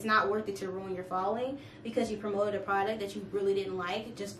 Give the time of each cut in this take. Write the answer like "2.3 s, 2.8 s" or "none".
none